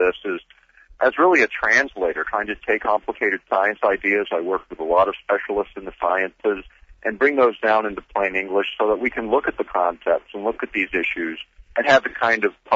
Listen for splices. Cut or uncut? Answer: uncut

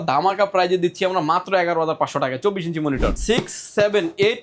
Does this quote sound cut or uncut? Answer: cut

